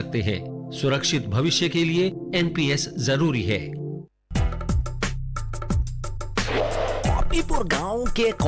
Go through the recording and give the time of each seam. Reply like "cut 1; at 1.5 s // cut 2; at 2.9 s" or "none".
cut 1; at 3.6 s